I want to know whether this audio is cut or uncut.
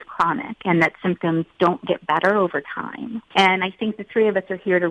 cut